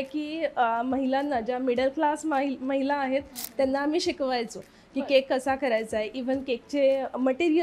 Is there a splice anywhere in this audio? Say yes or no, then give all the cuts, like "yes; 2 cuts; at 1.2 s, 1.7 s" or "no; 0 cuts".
no; 0 cuts